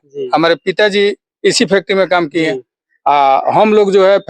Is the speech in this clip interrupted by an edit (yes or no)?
no